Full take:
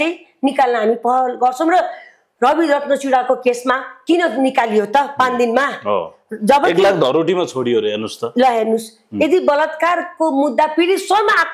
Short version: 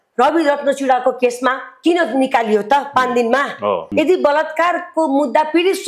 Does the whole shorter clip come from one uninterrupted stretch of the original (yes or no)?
no